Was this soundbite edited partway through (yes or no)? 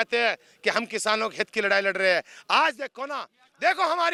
no